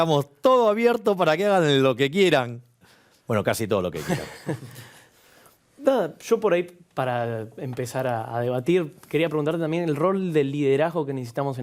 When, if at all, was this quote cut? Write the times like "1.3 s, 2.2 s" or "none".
none